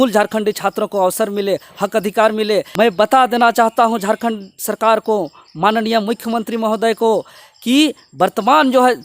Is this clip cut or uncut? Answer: cut